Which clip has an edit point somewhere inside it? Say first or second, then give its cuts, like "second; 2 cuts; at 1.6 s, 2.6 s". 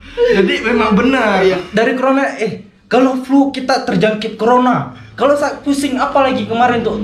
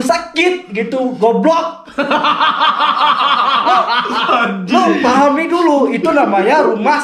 first; 1 cut; at 1.6 s